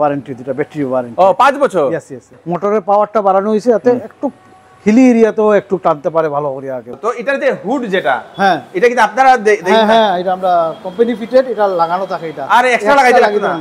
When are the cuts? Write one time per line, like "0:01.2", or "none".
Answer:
0:02.4
0:06.9